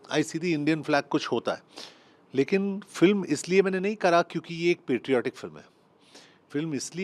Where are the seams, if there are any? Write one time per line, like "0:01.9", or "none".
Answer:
none